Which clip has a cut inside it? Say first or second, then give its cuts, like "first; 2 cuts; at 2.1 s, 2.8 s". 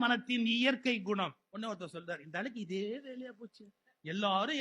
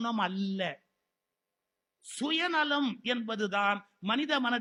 first; 1 cut; at 1.5 s